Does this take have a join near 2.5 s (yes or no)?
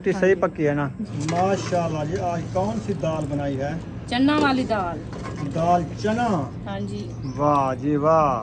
no